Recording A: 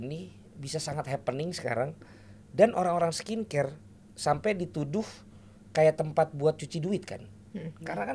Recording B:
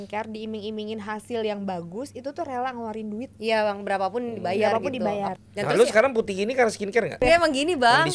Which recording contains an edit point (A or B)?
B